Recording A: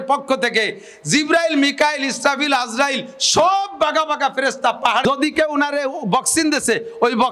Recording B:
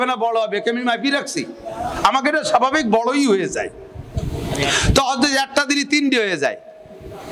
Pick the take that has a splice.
A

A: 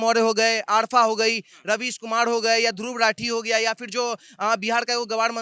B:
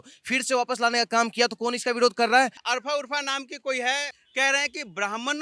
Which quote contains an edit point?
B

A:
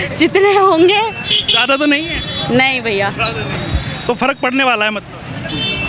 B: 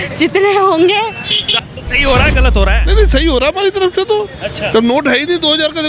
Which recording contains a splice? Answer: B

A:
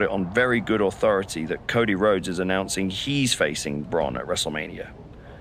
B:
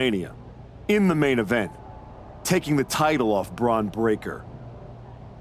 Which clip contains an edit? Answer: B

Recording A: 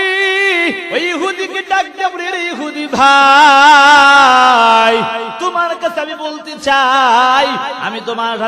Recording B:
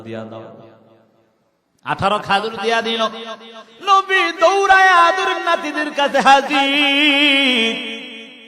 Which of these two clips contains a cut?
A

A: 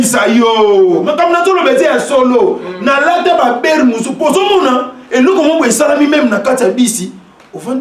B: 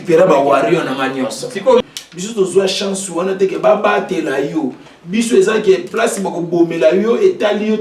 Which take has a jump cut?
B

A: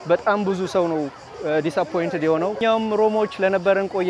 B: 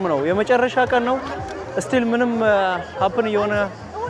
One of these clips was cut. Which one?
A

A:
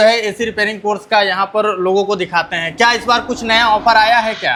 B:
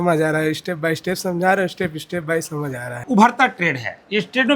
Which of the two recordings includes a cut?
B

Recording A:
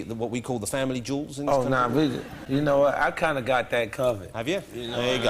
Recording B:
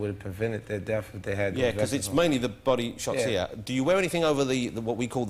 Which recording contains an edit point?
A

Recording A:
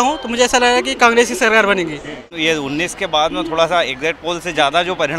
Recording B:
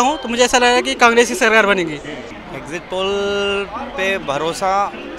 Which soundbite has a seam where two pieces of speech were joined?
A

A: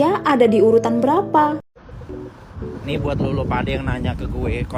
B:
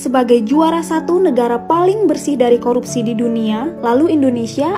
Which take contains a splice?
A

